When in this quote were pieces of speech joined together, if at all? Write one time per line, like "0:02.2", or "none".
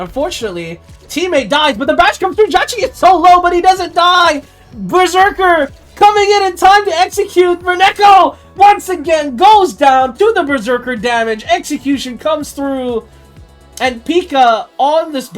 none